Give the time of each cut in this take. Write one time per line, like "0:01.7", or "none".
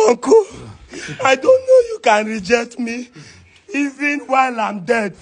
none